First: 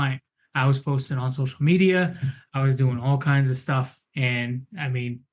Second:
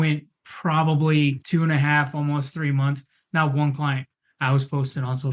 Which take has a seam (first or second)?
second